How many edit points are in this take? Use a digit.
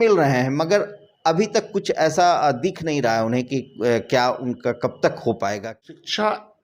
1